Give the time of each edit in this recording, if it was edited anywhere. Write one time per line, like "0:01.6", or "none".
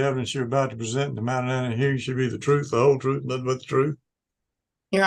none

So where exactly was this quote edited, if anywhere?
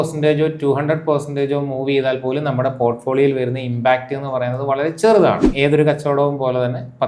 0:05.5

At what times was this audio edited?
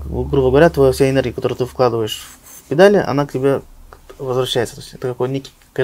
none

